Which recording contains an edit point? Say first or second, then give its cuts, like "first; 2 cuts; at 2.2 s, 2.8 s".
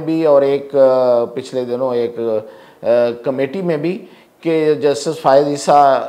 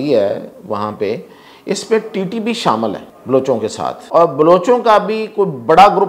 second; 2 cuts; at 3.1 s, 4.0 s